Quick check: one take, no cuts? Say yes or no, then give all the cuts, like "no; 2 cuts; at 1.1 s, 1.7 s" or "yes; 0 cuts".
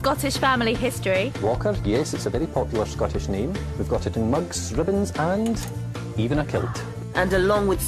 yes; 0 cuts